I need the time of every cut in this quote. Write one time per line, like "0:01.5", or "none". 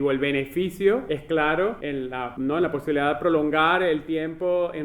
0:01.0
0:02.1